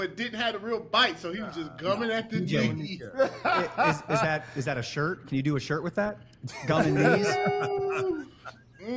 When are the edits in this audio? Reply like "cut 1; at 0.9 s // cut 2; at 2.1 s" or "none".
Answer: none